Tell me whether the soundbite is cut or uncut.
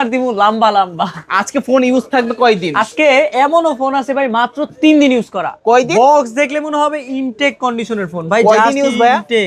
uncut